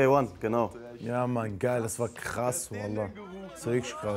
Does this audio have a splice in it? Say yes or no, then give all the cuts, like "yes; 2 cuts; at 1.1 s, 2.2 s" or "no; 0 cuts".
no; 0 cuts